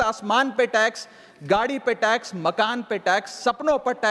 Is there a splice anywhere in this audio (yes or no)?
no